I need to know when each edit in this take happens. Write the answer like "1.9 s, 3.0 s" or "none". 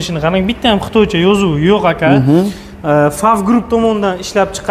none